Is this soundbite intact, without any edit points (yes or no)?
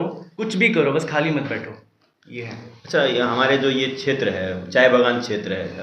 yes